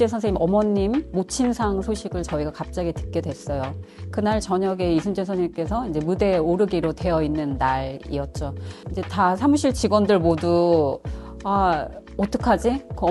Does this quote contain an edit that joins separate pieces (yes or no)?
no